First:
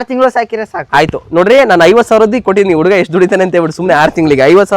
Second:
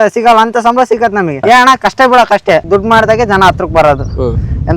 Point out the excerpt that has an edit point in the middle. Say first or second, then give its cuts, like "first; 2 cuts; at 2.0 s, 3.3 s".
second; 1 cut; at 2.6 s